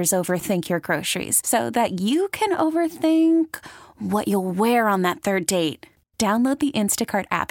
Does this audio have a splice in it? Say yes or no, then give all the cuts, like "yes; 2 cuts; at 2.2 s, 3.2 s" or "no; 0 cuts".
no; 0 cuts